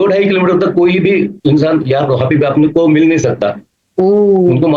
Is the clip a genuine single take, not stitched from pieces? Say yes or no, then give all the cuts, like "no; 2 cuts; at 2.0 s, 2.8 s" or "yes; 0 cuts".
no; 1 cut; at 1.3 s